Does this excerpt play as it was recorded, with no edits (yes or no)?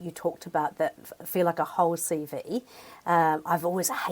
yes